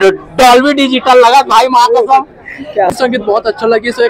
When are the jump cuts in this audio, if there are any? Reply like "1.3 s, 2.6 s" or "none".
2.9 s